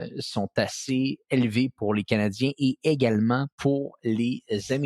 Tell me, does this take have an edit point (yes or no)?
yes